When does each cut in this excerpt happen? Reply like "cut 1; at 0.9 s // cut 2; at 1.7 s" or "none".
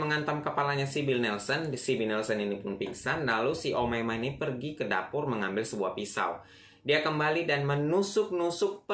none